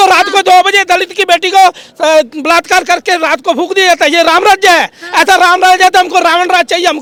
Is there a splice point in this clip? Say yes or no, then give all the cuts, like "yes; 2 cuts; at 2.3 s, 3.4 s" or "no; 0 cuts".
no; 0 cuts